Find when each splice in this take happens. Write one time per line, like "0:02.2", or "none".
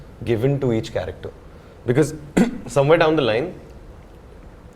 none